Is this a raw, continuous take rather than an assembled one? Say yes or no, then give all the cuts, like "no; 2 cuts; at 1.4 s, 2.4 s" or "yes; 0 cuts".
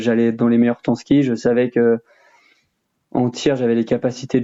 yes; 0 cuts